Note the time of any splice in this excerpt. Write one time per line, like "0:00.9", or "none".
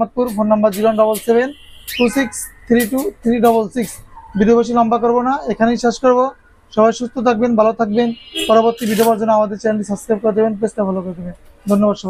none